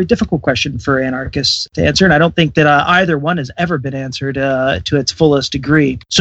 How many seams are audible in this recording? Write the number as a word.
one